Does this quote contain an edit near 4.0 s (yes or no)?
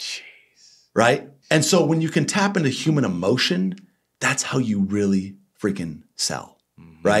no